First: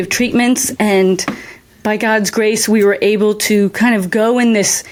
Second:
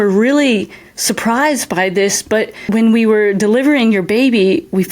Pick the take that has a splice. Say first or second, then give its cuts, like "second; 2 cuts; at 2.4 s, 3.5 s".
second; 1 cut; at 2.7 s